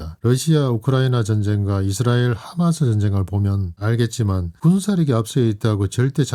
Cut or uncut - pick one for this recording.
uncut